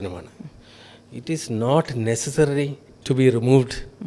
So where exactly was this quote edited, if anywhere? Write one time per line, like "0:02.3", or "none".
0:02.9